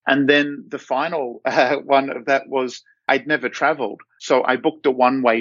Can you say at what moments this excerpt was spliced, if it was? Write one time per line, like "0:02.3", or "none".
none